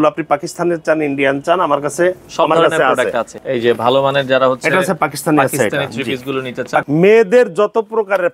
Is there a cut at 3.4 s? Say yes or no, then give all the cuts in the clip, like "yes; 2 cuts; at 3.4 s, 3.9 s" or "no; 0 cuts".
yes; 2 cuts; at 3.4 s, 6.8 s